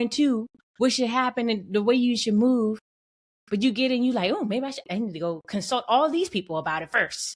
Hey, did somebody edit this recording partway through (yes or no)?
yes